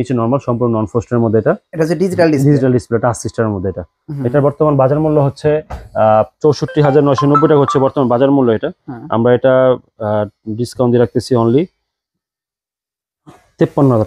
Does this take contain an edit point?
no; 0 cuts

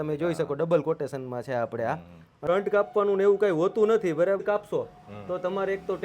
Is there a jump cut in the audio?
yes; 2 cuts; at 2.5 s, 4.4 s

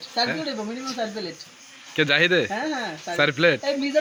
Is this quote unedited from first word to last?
yes; 0 cuts

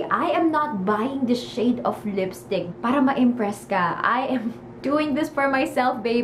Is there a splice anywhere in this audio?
yes; 1 cut; at 2.7 s

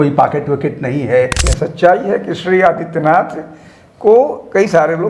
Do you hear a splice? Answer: yes; 1 cut; at 1.5 s

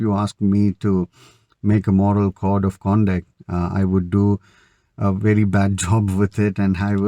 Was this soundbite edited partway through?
no; 0 cuts

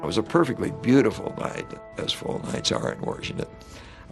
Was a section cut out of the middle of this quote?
yes; 1 cut; at 1.8 s

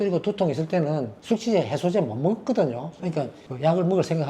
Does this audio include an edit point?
yes; 1 cut; at 3.0 s

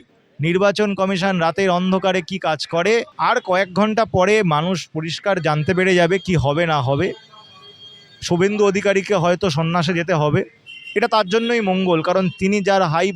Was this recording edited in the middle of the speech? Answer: yes; 1 cut; at 3.1 s

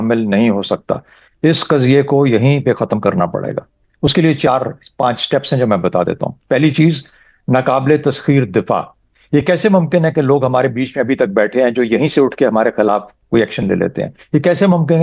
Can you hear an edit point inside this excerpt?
no; 0 cuts

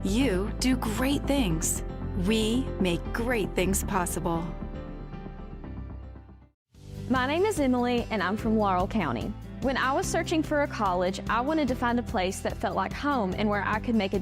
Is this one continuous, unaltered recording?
no; 1 cut; at 6.6 s

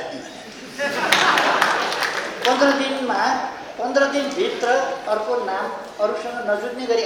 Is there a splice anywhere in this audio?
no; 0 cuts

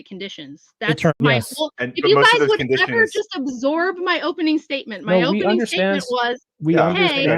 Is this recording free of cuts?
no; 1 cut; at 1.2 s

